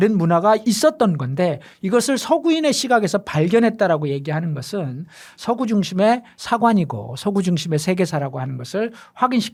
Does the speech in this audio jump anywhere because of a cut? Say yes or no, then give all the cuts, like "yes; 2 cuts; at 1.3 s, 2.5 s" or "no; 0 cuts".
no; 0 cuts